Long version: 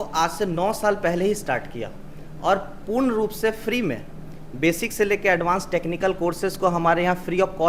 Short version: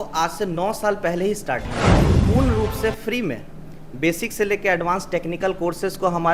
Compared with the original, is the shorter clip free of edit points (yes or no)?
no